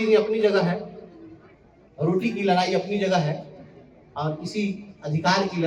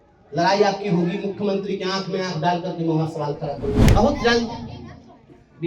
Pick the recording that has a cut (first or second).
second